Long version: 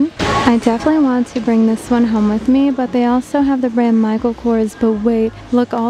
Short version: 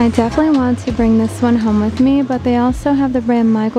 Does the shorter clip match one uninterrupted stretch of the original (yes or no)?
yes